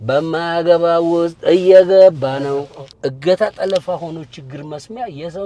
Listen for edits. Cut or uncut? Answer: cut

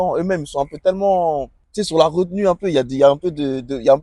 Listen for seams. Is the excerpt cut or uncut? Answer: cut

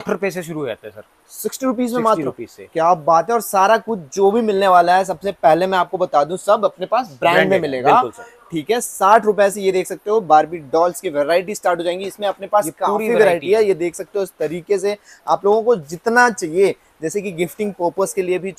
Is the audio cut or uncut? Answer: uncut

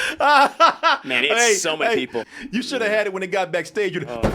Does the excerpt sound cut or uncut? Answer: cut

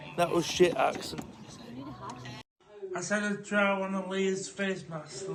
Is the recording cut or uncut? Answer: uncut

